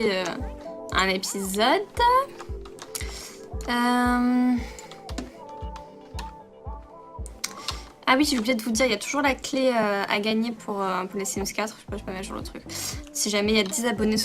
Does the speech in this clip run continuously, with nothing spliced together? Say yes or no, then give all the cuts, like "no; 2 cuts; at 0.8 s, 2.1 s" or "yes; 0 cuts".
no; 1 cut; at 8.2 s